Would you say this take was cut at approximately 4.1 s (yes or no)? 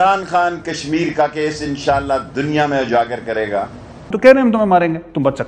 yes